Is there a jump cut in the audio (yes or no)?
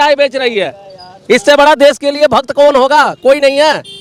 no